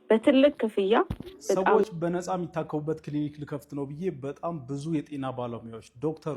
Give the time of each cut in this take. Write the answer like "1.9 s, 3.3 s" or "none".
1.7 s